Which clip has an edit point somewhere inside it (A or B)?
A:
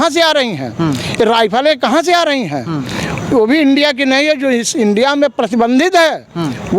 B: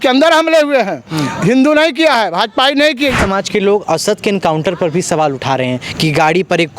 B